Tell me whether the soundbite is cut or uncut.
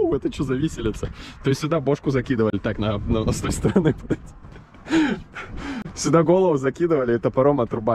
uncut